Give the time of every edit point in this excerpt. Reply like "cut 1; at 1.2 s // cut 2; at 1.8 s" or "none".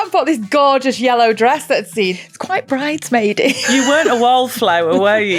cut 1; at 2.2 s // cut 2; at 3.6 s